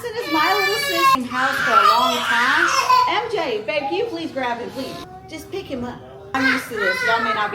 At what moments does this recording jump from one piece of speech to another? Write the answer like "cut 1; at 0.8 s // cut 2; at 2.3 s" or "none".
cut 1; at 1.1 s // cut 2; at 5.1 s // cut 3; at 6.3 s